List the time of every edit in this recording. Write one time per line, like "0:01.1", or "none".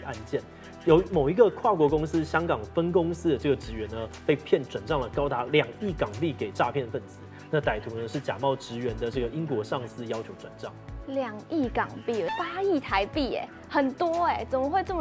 0:12.3